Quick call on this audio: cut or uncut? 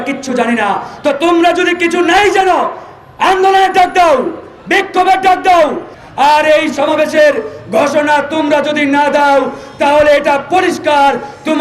cut